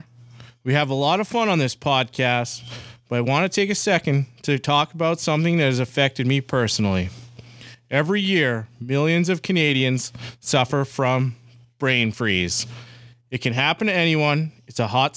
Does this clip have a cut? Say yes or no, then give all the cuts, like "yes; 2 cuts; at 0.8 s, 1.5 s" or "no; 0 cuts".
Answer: no; 0 cuts